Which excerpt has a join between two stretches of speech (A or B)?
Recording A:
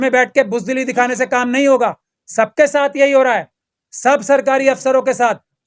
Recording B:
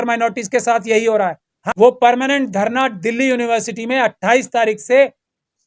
B